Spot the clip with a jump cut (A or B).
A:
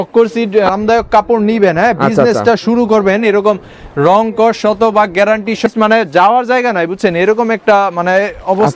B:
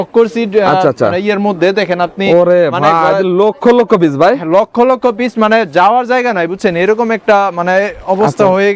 A